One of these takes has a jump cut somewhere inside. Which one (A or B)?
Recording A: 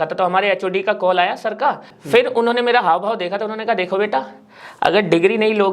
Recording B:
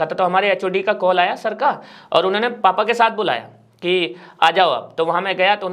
A